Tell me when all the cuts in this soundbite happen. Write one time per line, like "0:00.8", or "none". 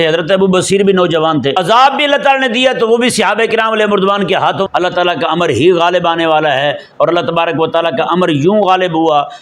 0:01.6
0:04.6